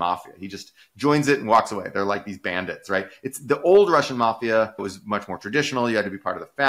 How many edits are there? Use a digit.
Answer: 1